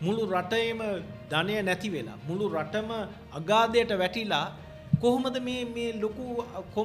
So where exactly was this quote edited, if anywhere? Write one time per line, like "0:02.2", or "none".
none